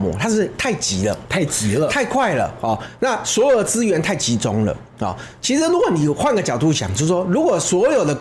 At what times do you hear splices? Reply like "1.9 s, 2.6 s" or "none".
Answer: none